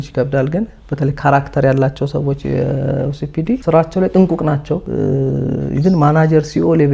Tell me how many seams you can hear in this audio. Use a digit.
2